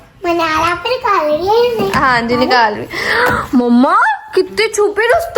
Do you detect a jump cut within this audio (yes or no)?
no